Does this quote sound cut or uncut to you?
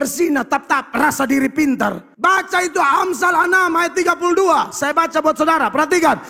cut